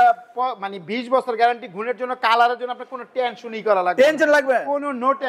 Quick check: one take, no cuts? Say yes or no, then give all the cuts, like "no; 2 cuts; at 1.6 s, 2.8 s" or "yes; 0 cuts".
yes; 0 cuts